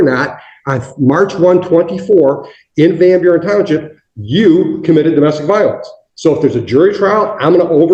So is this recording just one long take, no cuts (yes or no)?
yes